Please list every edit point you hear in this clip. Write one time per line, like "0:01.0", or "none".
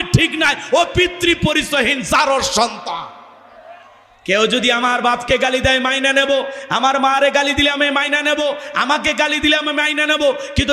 none